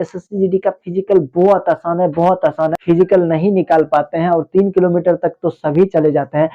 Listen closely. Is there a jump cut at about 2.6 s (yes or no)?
yes